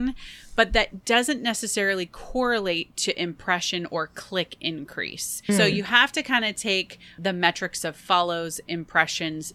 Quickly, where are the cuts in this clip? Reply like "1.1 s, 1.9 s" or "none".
5.5 s, 7.1 s